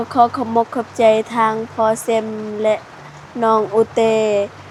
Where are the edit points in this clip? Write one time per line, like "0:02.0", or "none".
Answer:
none